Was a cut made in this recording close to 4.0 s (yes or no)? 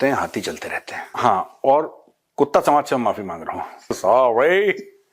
yes